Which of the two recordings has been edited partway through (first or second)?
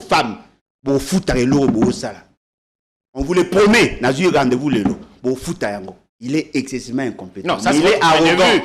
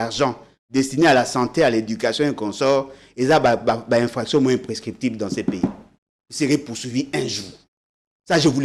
first